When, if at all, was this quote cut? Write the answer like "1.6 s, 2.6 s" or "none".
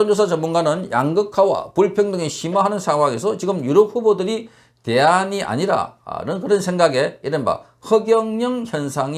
none

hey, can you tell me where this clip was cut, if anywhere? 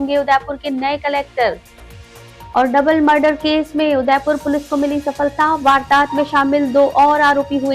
none

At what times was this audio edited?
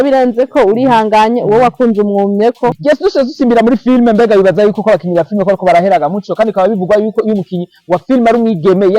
2.8 s

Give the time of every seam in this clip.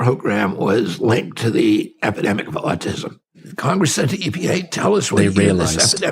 3.4 s

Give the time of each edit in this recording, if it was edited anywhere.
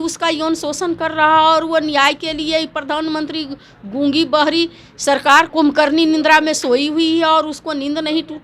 5.5 s

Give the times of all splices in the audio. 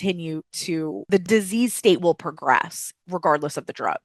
1.2 s

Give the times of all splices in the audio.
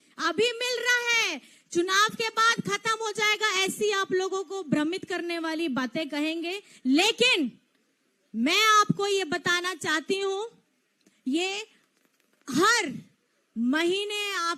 none

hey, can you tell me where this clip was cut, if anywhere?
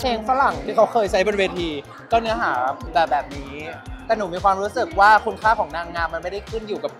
2.8 s

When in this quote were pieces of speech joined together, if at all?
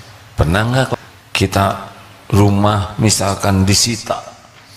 1.0 s

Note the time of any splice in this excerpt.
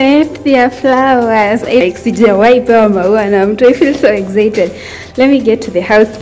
none

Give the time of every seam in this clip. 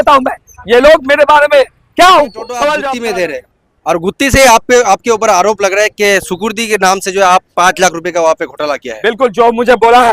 2.8 s

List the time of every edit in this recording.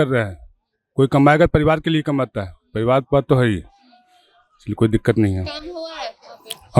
none

